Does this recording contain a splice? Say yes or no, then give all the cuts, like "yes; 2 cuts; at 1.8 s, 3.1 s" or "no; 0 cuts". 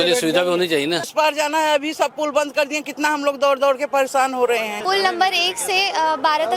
yes; 2 cuts; at 1.1 s, 4.8 s